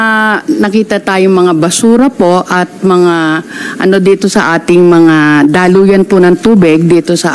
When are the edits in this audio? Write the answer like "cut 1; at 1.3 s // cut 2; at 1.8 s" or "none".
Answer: none